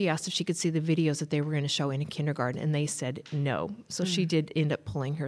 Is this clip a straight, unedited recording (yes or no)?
yes